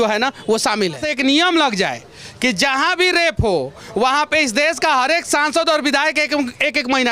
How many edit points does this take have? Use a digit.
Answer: 1